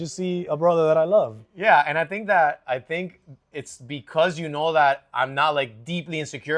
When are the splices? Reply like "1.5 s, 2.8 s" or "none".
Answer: none

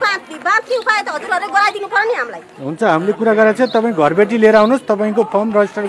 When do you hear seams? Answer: none

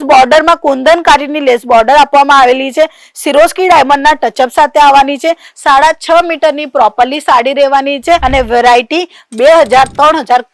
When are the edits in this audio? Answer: 8.2 s

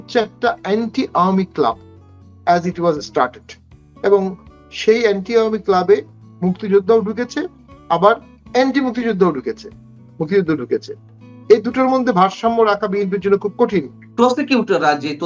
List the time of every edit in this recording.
14.0 s

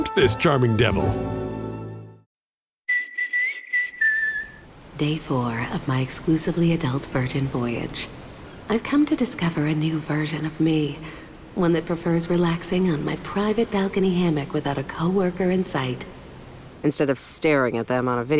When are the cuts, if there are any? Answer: 2.1 s

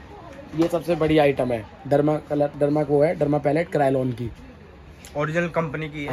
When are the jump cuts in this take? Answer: none

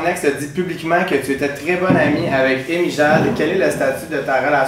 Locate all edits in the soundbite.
none

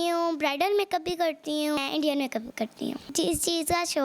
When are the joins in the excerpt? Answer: 1.8 s, 3.1 s

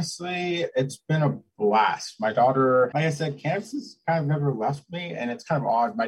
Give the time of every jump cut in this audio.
none

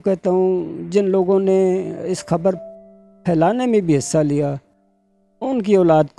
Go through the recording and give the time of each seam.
none

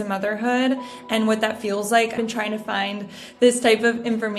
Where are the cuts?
2.2 s

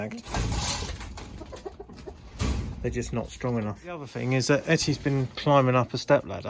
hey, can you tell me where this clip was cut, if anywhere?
4.2 s

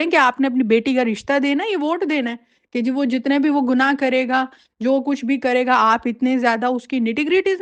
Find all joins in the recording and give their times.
none

